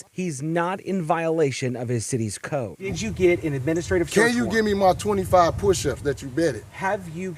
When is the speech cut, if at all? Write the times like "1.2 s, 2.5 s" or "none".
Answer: 2.8 s